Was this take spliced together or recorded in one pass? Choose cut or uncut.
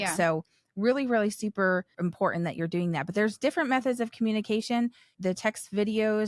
cut